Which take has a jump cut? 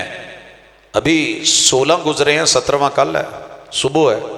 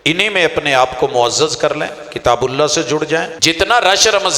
second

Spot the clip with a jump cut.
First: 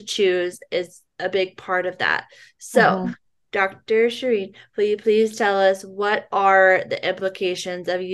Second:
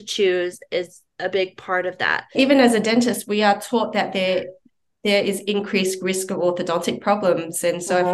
second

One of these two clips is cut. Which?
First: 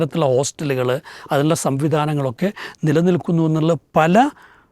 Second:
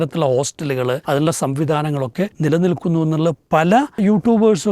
second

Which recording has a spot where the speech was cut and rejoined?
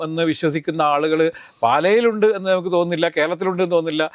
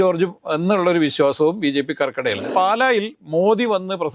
second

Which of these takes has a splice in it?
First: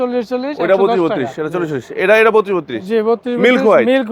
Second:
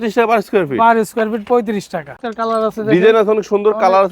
second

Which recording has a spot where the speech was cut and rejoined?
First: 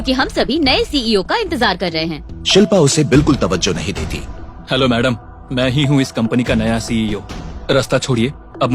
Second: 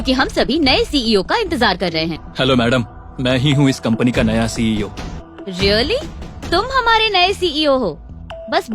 second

